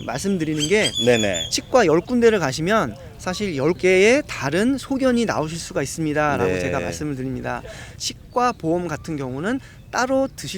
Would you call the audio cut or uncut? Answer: cut